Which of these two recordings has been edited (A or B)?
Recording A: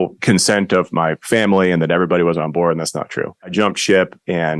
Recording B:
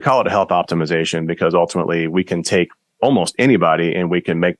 A